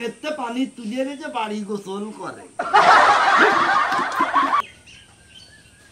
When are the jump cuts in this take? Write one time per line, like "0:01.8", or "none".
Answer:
0:04.6